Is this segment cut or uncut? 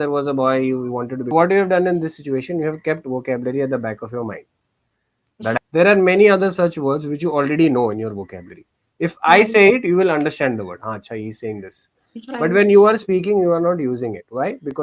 cut